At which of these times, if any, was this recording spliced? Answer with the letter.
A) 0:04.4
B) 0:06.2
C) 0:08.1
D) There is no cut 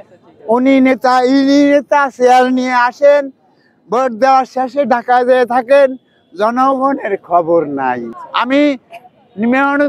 C